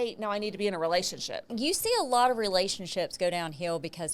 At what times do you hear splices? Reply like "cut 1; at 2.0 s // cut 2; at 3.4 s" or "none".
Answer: cut 1; at 1.5 s